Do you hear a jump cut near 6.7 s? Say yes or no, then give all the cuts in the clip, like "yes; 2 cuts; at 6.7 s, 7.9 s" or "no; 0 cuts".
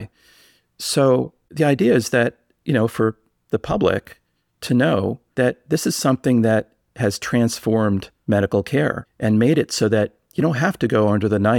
no; 4 cuts; at 1.4 s, 5.2 s, 8.1 s, 9.1 s